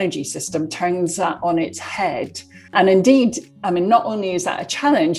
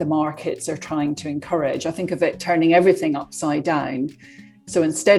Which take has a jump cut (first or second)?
first